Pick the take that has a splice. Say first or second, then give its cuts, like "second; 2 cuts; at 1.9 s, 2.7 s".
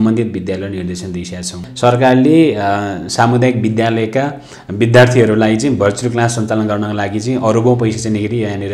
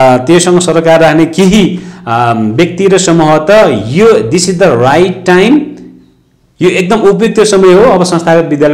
first; 1 cut; at 1.6 s